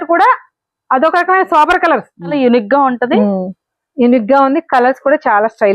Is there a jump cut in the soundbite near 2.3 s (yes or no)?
yes